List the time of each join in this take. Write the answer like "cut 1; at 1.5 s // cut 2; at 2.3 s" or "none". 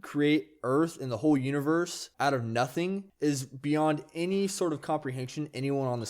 cut 1; at 2.0 s // cut 2; at 3.1 s